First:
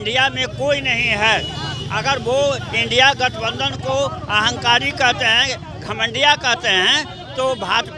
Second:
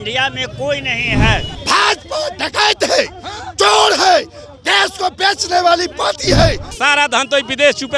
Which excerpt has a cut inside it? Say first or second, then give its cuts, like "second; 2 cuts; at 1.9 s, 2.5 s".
second; 2 cuts; at 1.5 s, 6.7 s